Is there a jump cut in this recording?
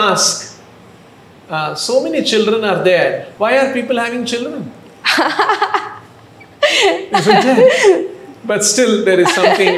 yes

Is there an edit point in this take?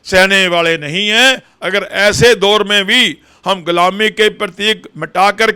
yes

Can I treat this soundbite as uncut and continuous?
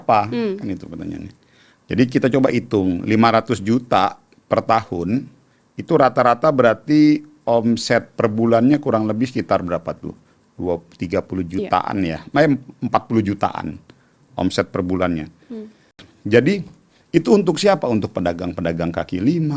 no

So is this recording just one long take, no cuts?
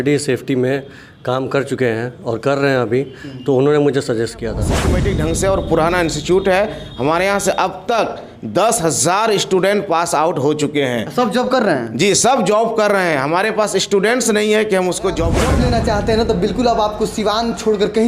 no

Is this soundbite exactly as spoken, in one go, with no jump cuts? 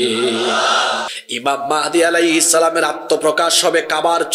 no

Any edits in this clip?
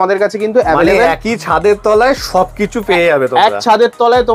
no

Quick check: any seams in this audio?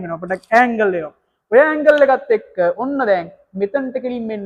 no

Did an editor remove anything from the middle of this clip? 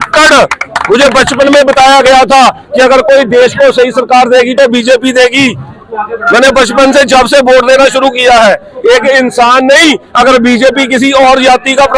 no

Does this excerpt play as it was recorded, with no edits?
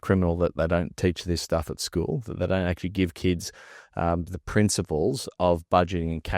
yes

